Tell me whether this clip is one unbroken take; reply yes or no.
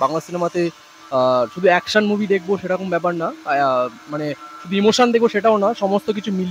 yes